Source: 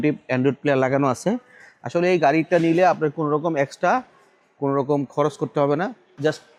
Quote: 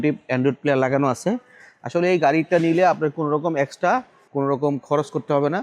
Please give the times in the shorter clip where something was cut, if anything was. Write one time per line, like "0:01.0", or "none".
0:04.2